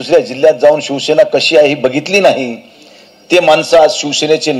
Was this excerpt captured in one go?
yes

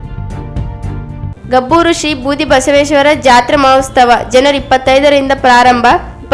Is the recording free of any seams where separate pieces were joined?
yes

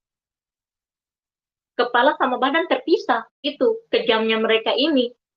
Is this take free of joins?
no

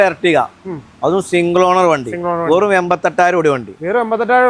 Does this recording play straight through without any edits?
yes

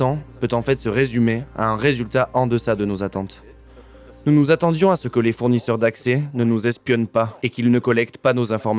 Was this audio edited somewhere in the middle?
no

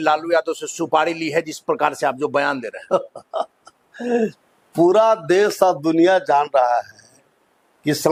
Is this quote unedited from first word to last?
yes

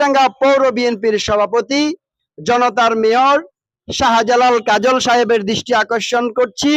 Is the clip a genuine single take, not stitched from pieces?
yes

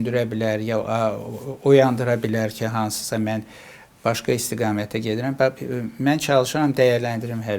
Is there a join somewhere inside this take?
no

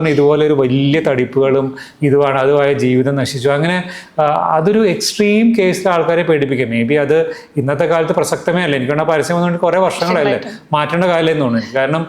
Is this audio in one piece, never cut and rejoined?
yes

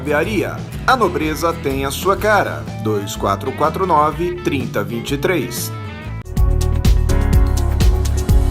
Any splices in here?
yes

